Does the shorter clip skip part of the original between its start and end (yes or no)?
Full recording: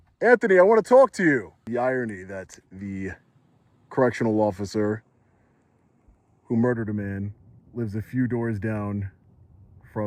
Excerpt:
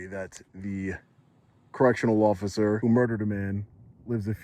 yes